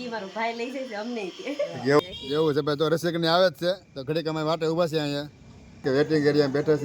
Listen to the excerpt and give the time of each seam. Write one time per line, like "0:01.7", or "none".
0:02.0
0:05.8